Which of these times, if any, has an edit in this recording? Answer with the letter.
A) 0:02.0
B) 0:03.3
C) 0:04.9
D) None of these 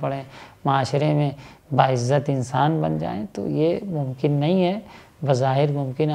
D